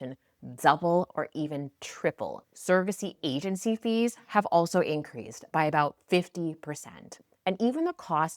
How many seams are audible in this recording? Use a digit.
1